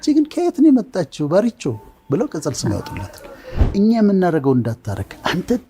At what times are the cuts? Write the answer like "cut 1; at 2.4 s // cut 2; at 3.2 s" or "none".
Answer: cut 1; at 3.6 s